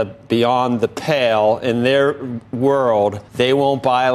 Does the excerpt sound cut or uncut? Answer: cut